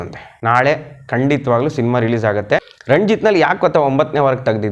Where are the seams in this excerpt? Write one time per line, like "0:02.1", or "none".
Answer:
0:02.7